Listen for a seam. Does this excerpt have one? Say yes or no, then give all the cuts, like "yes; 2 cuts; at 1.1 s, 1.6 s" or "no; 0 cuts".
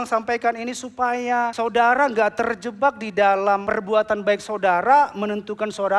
yes; 2 cuts; at 1.5 s, 3.7 s